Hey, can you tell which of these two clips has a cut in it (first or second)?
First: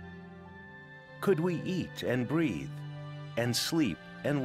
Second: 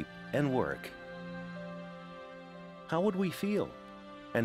first